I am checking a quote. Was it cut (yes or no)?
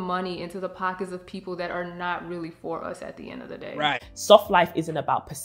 yes